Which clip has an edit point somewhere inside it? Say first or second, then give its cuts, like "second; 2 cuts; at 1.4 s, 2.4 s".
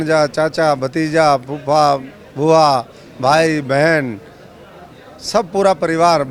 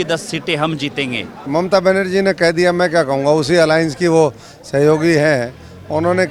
second; 1 cut; at 1.4 s